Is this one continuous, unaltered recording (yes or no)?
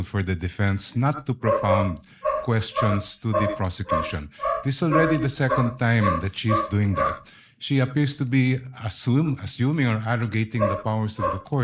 yes